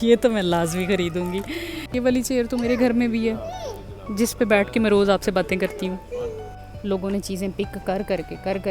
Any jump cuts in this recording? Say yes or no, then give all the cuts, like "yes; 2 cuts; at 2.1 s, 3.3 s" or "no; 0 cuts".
yes; 2 cuts; at 1.8 s, 6.5 s